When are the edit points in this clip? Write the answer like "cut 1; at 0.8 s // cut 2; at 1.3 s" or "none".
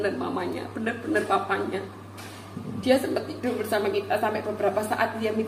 none